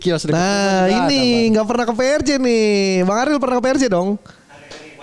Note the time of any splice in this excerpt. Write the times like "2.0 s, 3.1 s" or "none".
none